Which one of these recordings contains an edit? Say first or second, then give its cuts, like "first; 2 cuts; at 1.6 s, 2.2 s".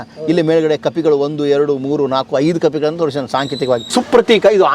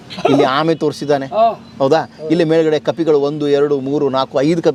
first; 1 cut; at 3.9 s